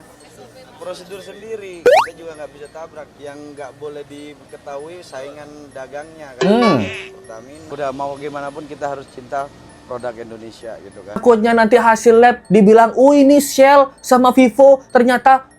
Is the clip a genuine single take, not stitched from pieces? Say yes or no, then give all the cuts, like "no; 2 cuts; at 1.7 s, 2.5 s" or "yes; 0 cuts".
no; 3 cuts; at 3.1 s, 7.6 s, 11.2 s